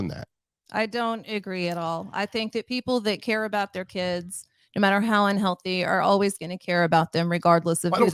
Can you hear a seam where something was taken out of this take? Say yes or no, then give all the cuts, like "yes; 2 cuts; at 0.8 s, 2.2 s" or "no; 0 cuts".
no; 0 cuts